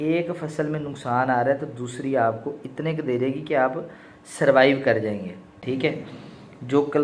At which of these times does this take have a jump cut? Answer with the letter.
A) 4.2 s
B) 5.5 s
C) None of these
B